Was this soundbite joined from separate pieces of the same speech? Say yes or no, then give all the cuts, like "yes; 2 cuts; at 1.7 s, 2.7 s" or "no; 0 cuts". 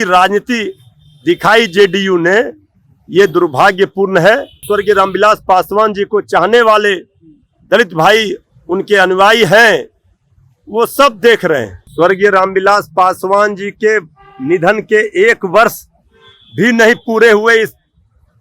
yes; 2 cuts; at 4.6 s, 11.8 s